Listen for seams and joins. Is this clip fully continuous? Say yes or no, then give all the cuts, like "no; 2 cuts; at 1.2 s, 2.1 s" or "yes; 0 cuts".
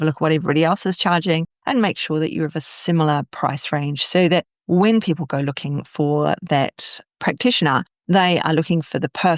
yes; 0 cuts